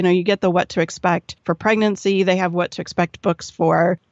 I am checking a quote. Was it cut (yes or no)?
yes